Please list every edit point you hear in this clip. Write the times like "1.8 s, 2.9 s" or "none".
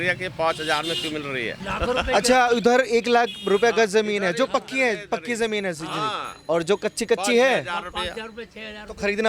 1.6 s